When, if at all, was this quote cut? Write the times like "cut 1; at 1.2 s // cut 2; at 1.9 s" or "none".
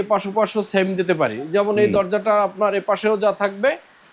none